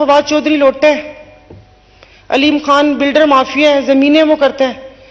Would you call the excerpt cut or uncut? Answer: uncut